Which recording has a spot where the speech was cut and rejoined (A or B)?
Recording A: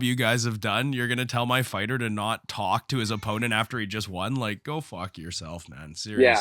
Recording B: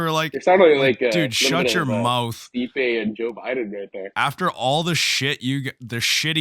B